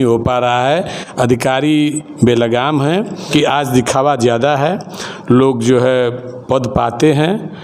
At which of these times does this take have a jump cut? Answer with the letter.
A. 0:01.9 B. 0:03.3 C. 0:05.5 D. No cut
B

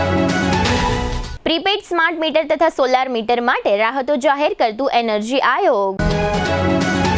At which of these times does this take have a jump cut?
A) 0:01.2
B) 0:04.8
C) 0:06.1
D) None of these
A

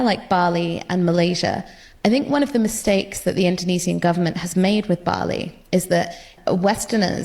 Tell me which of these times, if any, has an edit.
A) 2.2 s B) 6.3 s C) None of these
B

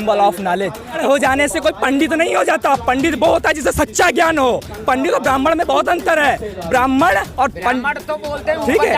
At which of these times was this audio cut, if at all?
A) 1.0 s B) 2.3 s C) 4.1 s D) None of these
A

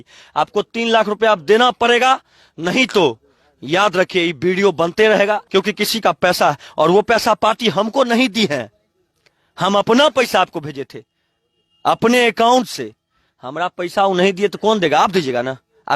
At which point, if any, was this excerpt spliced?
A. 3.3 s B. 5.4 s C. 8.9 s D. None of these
B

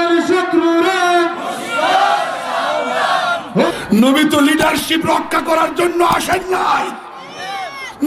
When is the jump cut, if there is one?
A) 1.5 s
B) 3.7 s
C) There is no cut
B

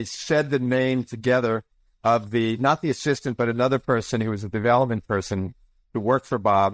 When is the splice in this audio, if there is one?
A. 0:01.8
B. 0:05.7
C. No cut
C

